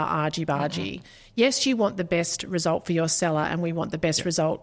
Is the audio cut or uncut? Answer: uncut